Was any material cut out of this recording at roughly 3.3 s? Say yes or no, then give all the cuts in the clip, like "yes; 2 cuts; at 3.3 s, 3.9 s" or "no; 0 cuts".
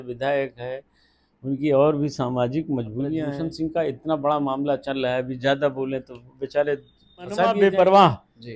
yes; 2 cuts; at 3.3 s, 7.5 s